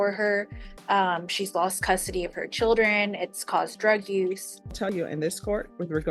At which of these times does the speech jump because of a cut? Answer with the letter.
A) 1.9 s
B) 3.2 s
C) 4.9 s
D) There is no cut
C